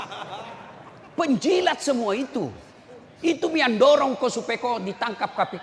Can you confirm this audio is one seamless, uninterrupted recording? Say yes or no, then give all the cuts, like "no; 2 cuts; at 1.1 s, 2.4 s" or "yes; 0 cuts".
yes; 0 cuts